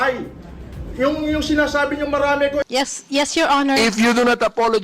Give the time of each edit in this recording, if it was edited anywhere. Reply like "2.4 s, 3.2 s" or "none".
2.6 s